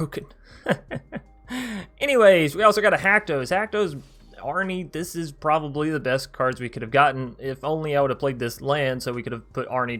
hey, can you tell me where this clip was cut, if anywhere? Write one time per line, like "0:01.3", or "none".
none